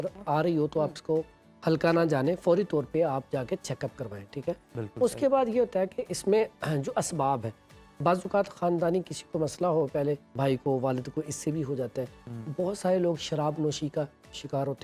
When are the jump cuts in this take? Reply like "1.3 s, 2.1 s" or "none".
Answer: none